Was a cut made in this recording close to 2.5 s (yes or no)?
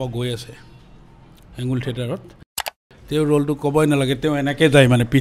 yes